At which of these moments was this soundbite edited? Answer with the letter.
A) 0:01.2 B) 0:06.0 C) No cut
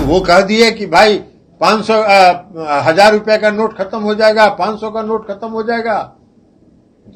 C